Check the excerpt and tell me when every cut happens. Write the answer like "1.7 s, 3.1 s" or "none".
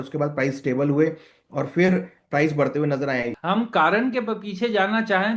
3.3 s

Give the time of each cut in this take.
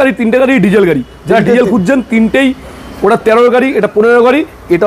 none

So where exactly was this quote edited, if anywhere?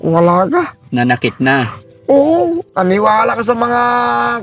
2.7 s

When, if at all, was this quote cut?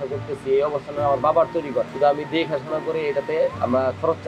1.9 s

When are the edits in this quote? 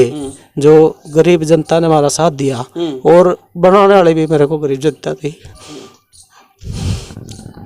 none

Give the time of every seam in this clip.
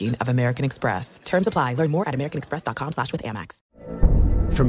3.7 s

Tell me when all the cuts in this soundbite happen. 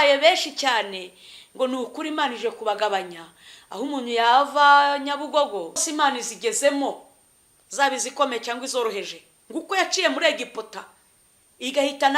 5.9 s

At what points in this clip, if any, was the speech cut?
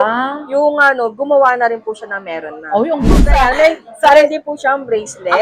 3.1 s

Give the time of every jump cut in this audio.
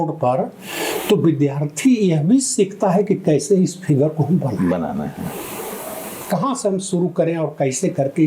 none

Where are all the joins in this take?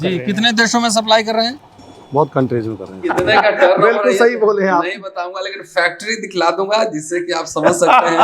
3.0 s

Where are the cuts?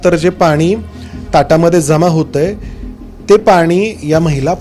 none

